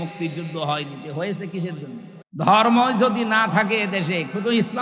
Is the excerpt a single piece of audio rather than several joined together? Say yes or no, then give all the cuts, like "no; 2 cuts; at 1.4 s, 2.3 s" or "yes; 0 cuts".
no; 1 cut; at 2.2 s